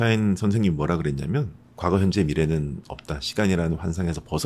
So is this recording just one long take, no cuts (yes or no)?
yes